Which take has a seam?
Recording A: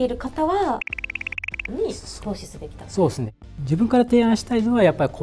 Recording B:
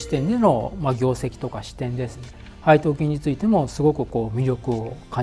A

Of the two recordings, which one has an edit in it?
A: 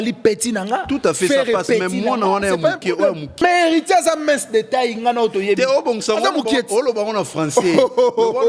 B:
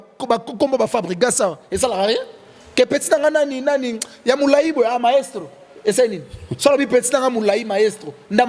A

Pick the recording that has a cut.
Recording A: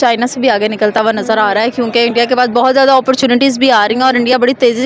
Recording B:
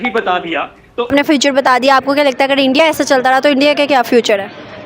B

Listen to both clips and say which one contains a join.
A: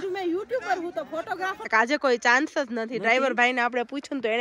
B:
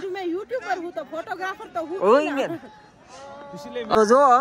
A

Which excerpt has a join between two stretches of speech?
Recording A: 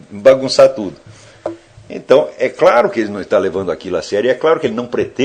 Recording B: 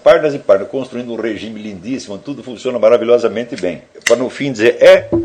B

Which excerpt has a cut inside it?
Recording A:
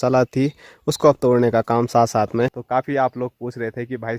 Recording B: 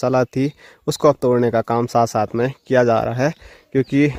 A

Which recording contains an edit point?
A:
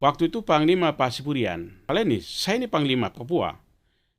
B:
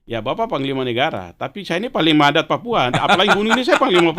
A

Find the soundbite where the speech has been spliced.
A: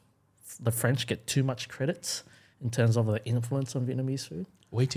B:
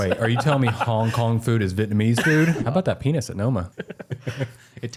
B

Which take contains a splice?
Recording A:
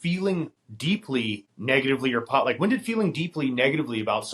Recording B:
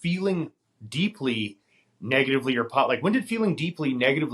A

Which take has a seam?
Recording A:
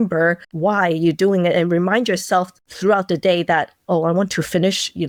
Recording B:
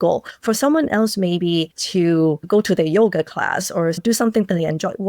B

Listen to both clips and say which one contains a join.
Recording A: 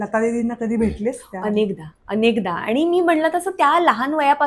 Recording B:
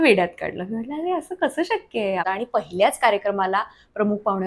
B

